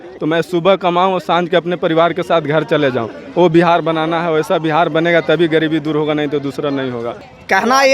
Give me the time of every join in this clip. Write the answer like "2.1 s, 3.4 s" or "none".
none